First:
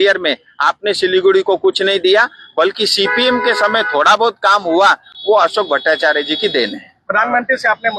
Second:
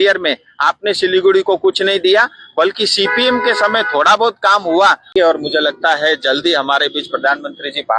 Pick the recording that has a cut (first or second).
second